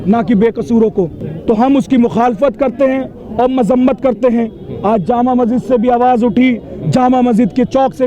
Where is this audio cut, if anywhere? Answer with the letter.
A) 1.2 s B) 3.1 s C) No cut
A